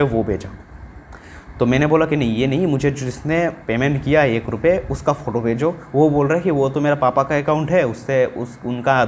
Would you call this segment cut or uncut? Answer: uncut